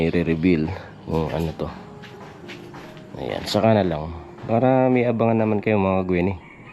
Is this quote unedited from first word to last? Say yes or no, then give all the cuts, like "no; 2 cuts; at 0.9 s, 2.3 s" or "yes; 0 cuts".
yes; 0 cuts